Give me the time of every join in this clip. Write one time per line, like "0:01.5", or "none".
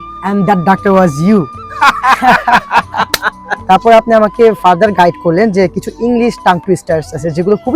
0:03.5

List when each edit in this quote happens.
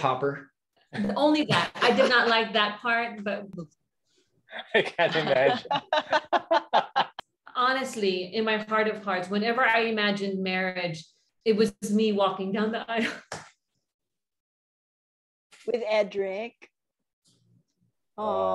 0:03.5
0:07.1

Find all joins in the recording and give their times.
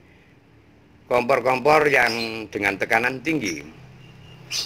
0:01.8

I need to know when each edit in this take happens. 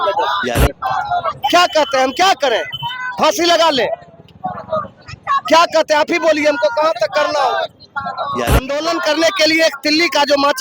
0:08.8

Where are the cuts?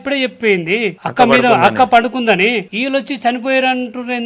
0:01.0
0:02.7

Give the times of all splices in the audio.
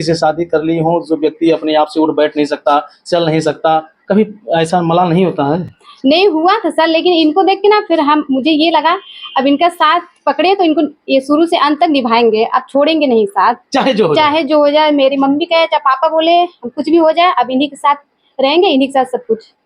none

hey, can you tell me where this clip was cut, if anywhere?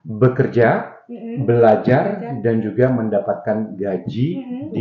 none

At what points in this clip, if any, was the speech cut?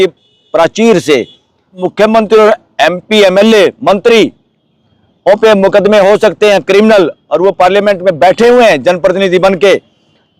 0:01.8

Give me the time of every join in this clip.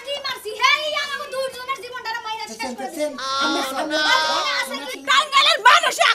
0:04.9

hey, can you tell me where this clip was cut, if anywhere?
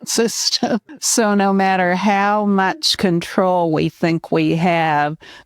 0:01.0

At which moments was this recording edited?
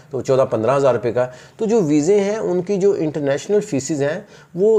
none

